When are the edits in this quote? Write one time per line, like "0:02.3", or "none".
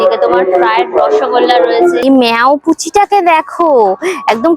0:02.1